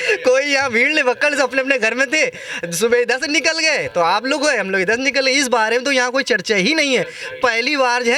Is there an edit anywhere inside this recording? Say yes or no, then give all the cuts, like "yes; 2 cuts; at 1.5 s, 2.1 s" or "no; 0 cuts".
no; 0 cuts